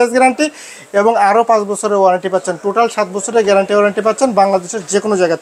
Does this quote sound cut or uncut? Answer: uncut